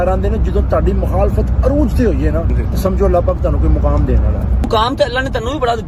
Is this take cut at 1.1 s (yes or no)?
no